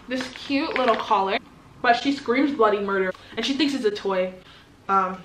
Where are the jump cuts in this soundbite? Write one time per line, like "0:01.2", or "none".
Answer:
0:01.4
0:03.2